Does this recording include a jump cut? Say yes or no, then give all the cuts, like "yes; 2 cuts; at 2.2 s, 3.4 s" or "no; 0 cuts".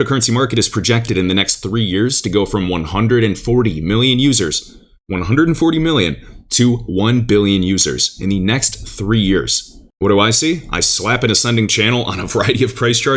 no; 0 cuts